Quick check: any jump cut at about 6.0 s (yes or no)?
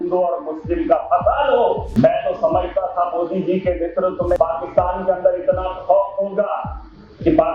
no